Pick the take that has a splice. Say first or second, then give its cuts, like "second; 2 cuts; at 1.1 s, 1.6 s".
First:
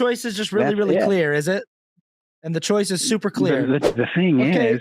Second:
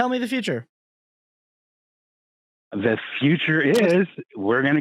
first; 1 cut; at 3.9 s